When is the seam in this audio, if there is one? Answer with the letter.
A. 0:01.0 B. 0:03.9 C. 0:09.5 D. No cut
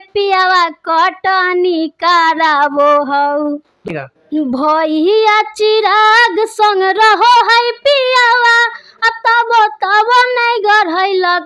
B